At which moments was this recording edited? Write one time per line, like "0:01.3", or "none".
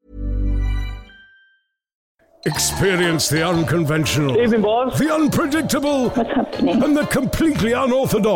0:02.3